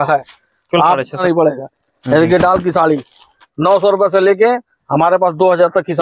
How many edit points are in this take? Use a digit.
1